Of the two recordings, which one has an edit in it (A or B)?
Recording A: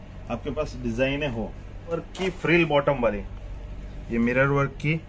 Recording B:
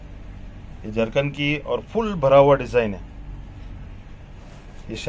A